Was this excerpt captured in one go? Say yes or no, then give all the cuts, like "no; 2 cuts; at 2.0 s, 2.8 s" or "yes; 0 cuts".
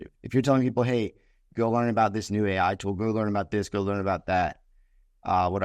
yes; 0 cuts